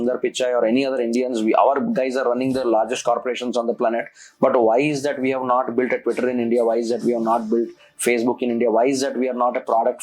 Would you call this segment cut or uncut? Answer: uncut